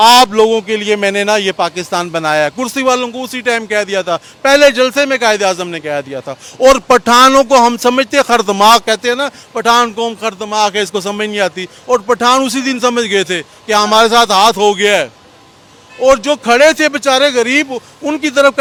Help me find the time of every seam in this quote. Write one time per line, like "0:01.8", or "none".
none